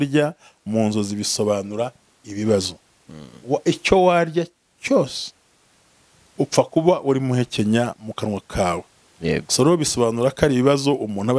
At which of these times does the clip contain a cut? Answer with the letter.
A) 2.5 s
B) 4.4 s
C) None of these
C